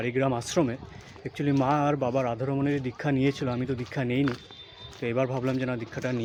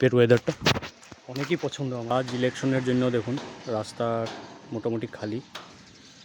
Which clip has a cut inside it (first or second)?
second